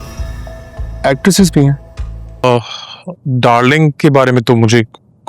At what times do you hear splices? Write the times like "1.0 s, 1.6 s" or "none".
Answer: 2.4 s